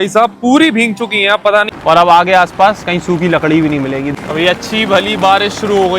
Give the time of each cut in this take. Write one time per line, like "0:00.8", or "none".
0:01.7
0:04.0